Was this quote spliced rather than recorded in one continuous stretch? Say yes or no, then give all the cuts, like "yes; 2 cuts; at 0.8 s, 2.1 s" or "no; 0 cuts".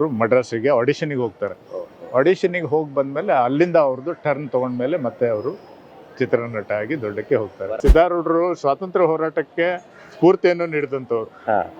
yes; 1 cut; at 7.7 s